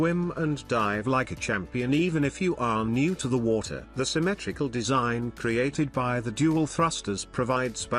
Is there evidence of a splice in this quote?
yes; 1 cut; at 3.8 s

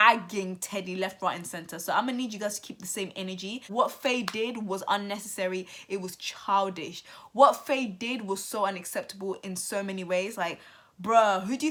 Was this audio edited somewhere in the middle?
no; 0 cuts

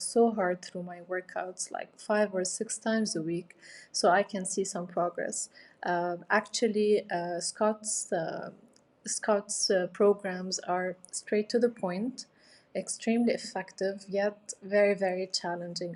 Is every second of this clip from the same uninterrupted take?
yes; 0 cuts

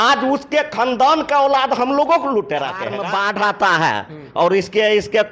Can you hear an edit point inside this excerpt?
yes; 1 cut; at 2.9 s

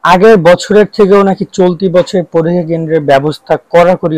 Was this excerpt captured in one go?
yes; 0 cuts

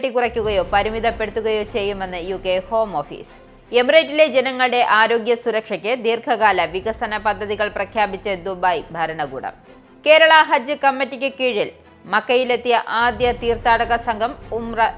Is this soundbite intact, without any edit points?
yes; 0 cuts

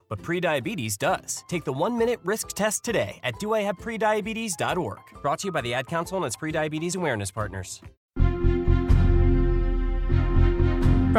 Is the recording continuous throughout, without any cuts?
no; 1 cut; at 8.0 s

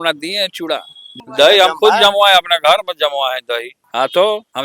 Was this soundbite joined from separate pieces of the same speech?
yes; 2 cuts; at 1.1 s, 3.8 s

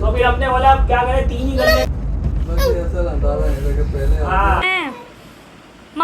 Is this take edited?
yes; 1 cut; at 4.6 s

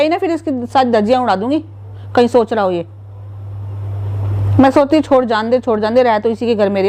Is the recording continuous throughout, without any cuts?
yes; 0 cuts

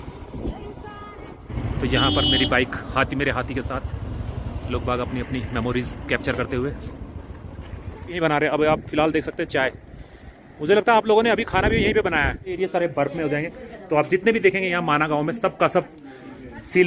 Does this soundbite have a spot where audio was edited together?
yes; 3 cuts; at 1.5 s, 8.2 s, 12.6 s

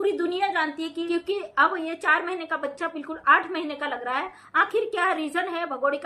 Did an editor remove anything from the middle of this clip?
yes; 1 cut; at 1.0 s

